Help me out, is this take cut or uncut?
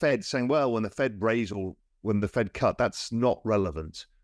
uncut